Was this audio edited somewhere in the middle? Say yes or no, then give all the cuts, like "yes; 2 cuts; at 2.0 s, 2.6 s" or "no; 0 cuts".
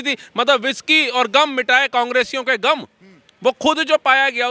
no; 0 cuts